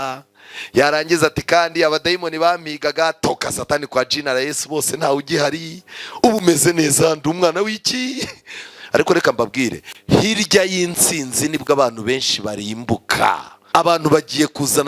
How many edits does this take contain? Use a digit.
1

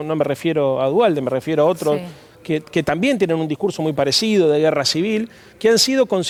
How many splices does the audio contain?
0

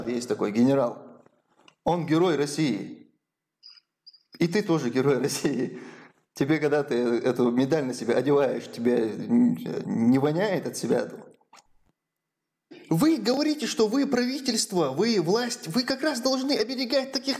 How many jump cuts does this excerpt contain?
1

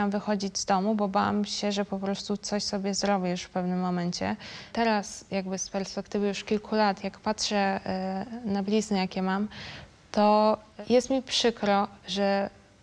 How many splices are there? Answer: 2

